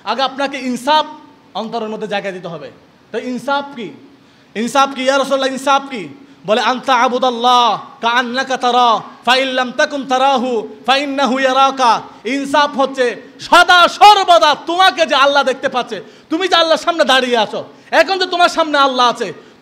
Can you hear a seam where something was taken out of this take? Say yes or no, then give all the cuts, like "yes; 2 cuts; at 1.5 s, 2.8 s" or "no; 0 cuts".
no; 0 cuts